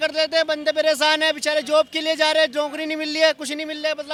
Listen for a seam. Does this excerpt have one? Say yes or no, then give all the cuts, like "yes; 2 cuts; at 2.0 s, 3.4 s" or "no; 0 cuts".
no; 0 cuts